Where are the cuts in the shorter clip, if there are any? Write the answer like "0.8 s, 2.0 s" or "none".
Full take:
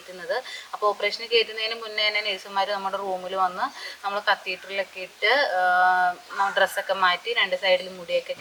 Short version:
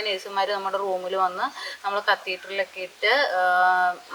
none